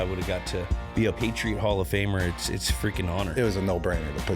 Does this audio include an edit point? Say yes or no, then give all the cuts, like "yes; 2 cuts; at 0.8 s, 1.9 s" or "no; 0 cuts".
yes; 2 cuts; at 1.1 s, 3.3 s